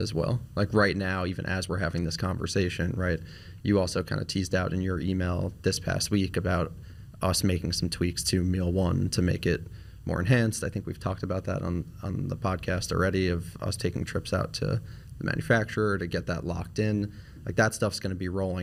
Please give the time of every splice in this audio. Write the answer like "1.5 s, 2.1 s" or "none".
none

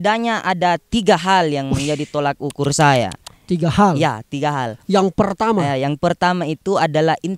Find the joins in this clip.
none

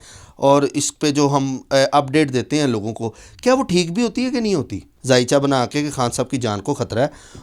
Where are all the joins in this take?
4.9 s

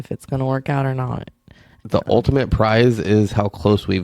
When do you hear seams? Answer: 1.7 s

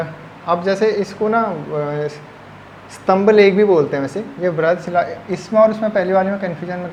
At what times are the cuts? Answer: none

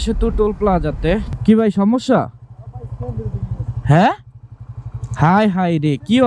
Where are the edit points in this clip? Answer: 1.3 s

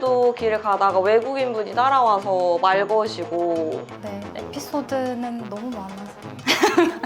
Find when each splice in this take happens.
3.9 s

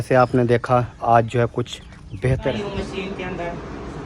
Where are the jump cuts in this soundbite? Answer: 2.5 s

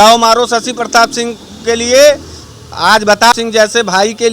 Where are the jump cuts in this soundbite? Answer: 3.3 s

